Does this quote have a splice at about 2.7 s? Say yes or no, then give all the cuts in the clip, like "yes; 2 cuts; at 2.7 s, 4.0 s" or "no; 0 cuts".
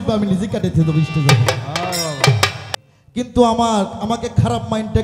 yes; 1 cut; at 2.7 s